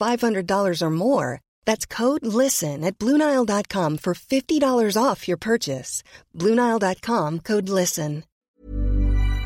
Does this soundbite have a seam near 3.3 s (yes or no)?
no